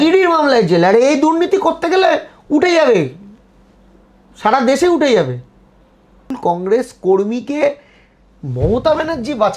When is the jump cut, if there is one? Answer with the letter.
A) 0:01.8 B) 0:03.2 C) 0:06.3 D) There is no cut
C